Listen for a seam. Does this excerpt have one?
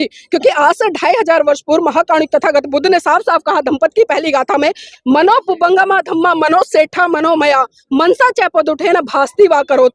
yes; 1 cut; at 4.9 s

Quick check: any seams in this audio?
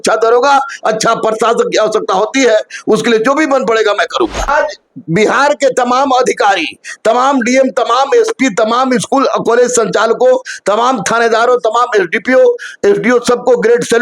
yes; 1 cut; at 4.5 s

